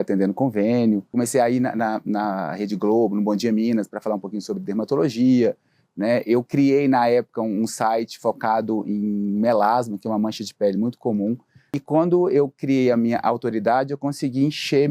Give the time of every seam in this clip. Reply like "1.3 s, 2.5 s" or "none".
1.1 s, 11.8 s